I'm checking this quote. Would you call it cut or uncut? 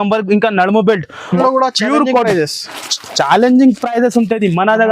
cut